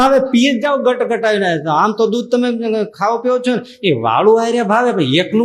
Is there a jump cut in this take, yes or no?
no